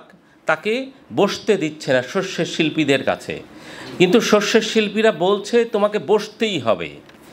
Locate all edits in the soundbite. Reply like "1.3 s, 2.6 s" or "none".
none